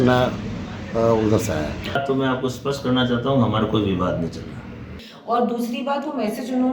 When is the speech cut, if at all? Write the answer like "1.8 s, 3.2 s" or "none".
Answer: 2.1 s, 5.1 s

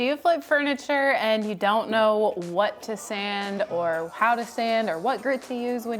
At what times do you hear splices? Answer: none

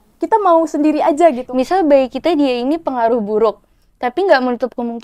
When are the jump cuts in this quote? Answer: 1.4 s

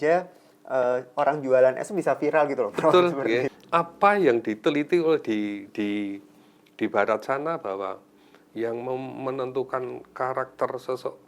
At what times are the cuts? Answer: 3.6 s

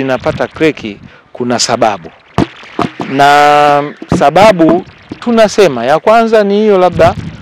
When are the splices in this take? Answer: none

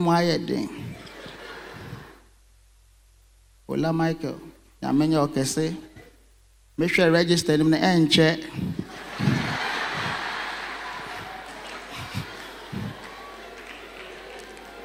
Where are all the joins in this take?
none

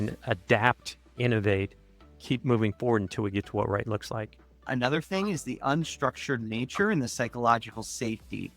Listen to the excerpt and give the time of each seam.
4.7 s

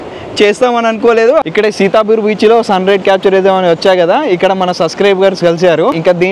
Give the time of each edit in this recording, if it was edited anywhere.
1.5 s

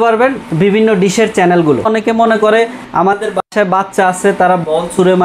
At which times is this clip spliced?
1.8 s

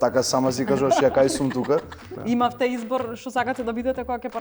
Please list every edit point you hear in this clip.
2.1 s

